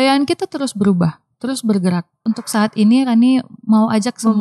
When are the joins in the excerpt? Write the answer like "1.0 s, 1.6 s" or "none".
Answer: 2.2 s

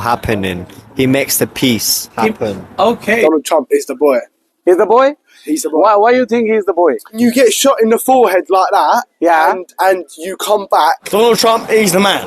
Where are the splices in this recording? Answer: 3.2 s, 7.2 s, 11.0 s

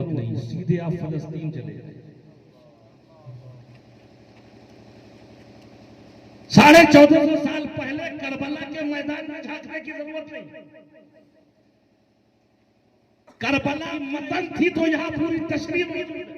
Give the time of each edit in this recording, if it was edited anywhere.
14.1 s

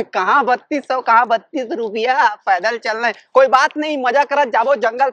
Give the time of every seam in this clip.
none

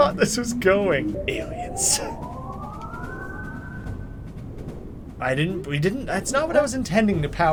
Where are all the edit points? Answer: none

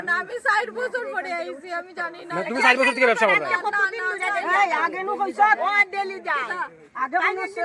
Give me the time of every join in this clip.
none

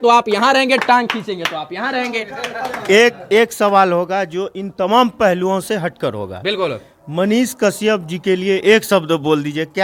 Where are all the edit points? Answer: none

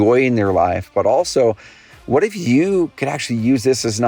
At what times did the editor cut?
none

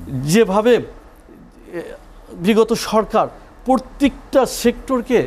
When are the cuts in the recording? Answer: none

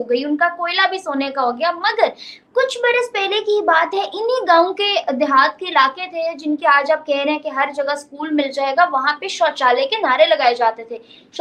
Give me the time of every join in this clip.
none

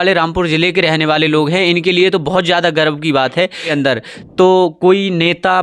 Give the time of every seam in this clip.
3.7 s

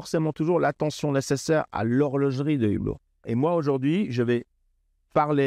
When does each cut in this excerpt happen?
3.2 s

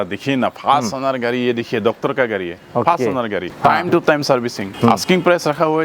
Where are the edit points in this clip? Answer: 2.5 s, 3.5 s, 4.6 s

